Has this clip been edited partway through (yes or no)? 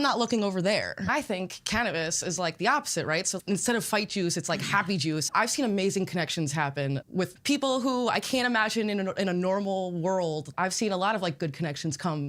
yes